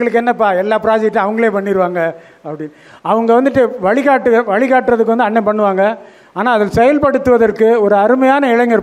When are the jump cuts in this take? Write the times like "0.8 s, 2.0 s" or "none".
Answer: none